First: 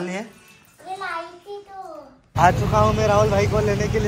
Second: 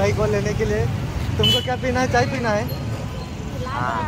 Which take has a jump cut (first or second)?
first